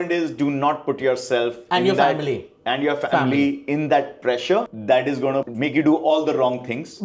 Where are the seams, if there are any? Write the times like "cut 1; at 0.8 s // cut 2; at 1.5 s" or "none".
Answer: cut 1; at 5.5 s